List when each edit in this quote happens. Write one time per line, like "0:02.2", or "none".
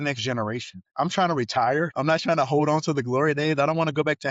0:00.8
0:01.9